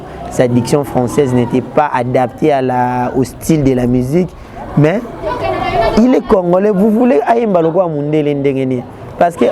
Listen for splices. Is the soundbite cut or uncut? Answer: uncut